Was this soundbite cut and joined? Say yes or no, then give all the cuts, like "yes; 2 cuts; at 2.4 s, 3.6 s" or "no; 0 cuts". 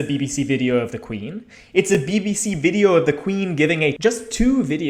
yes; 2 cuts; at 1.9 s, 4.0 s